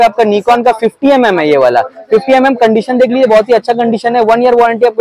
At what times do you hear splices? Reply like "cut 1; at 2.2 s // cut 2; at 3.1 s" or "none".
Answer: none